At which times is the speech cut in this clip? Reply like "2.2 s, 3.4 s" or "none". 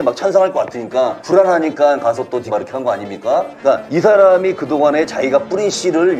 1.2 s, 2.5 s, 3.7 s